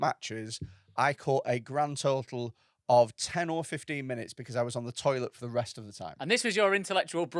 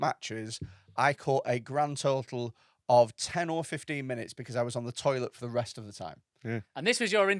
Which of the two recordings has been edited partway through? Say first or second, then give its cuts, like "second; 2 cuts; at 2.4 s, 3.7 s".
first; 1 cut; at 6.1 s